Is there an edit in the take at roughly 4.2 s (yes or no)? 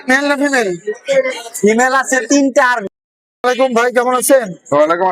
no